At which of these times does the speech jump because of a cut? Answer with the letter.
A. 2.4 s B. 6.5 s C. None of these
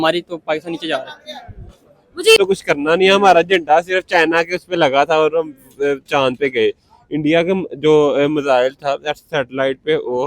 A